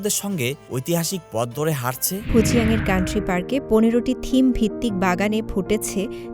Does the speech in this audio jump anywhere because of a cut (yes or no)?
yes